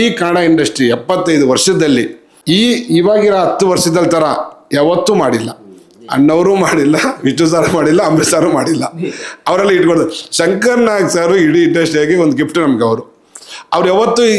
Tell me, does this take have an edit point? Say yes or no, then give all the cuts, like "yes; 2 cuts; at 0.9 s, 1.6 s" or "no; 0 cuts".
no; 0 cuts